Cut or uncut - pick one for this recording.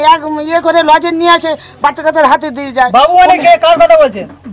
uncut